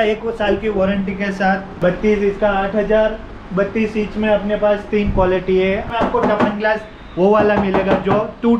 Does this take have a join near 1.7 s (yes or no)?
yes